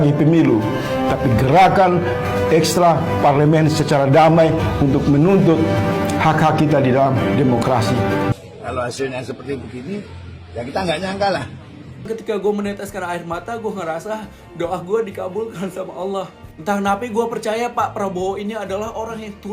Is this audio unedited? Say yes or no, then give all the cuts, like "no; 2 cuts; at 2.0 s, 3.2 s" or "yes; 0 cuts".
no; 2 cuts; at 8.3 s, 12.1 s